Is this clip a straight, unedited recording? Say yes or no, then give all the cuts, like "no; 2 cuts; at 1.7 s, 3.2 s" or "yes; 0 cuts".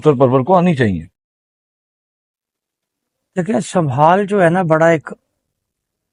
yes; 0 cuts